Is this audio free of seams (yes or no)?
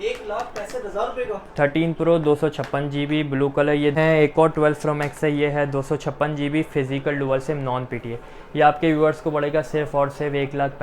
no